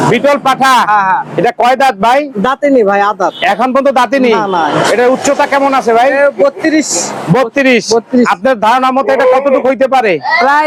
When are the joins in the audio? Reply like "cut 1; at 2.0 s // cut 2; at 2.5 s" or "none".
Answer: none